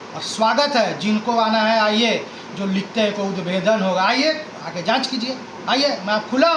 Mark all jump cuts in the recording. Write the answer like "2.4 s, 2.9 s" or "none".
none